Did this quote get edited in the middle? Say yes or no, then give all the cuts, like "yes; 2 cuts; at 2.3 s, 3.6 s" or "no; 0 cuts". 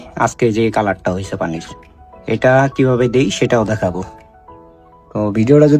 no; 0 cuts